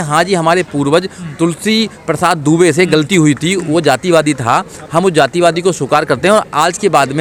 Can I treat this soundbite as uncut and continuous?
yes; 0 cuts

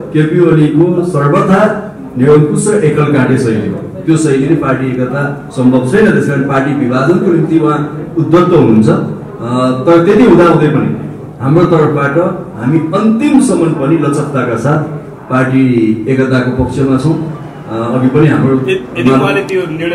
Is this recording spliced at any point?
no; 0 cuts

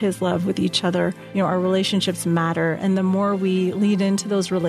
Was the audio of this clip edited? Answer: yes; 1 cut; at 1.2 s

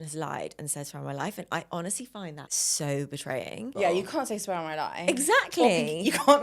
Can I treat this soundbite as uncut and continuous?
no; 2 cuts; at 2.5 s, 3.7 s

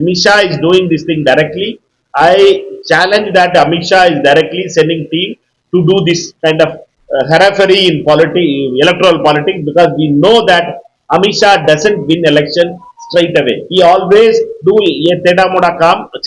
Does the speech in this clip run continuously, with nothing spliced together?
yes; 0 cuts

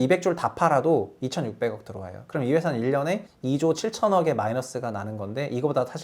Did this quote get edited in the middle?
yes; 1 cut; at 3.3 s

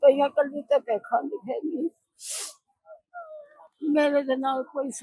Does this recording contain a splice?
no; 0 cuts

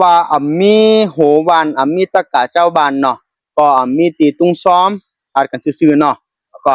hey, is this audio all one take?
yes; 0 cuts

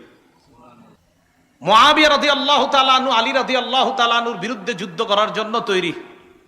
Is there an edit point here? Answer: yes; 1 cut; at 1.0 s

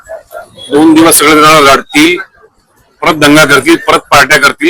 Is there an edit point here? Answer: no; 0 cuts

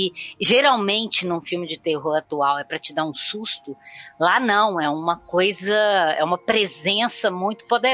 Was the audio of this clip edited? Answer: no; 0 cuts

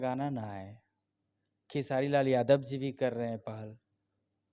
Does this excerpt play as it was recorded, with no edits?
yes; 0 cuts

